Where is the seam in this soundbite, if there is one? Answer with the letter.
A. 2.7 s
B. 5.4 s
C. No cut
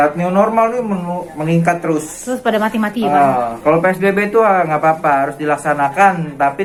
C